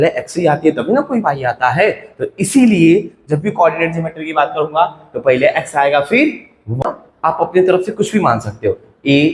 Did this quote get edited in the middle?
yes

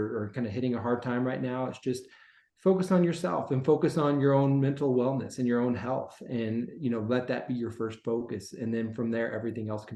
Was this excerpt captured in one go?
yes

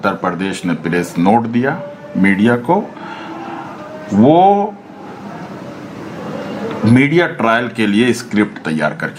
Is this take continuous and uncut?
yes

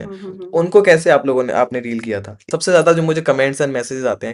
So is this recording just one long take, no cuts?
no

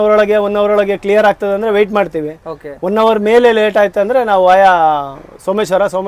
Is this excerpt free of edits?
yes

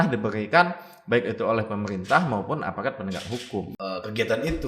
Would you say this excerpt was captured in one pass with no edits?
no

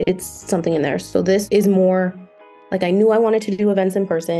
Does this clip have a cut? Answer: no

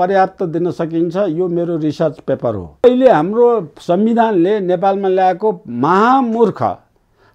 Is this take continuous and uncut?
no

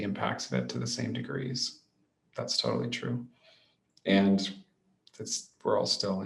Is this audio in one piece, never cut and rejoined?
yes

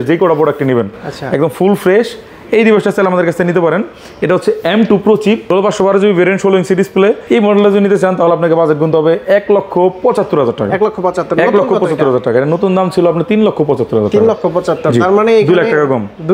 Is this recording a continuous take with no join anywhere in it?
yes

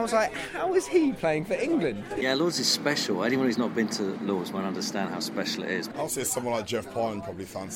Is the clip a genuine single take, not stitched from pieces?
no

